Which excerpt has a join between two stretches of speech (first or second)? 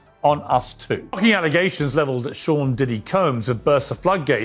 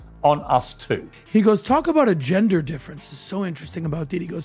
first